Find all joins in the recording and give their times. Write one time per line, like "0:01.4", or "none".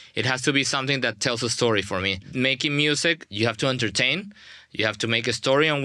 0:02.2
0:03.3